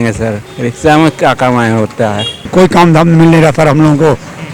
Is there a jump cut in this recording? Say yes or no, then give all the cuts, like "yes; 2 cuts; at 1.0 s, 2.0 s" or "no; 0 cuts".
yes; 1 cut; at 2.5 s